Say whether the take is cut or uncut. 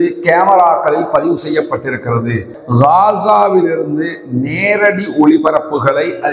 cut